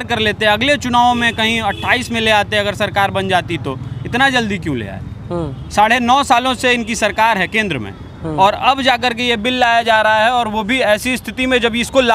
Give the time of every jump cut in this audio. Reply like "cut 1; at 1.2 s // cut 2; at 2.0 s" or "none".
none